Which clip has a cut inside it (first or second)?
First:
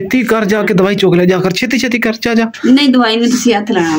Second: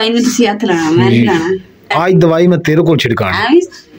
second